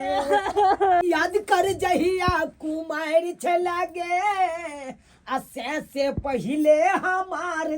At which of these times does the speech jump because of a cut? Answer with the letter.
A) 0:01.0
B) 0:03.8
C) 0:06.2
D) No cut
A